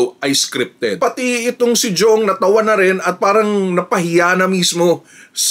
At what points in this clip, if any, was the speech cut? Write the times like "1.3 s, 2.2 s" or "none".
1.0 s